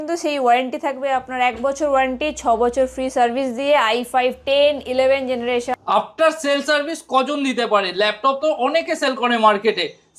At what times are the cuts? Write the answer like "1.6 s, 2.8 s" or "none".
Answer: 5.7 s